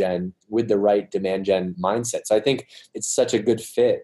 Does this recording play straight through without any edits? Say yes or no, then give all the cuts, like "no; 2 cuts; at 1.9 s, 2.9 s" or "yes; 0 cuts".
no; 2 cuts; at 1.7 s, 2.9 s